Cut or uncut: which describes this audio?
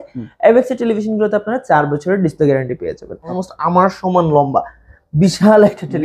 cut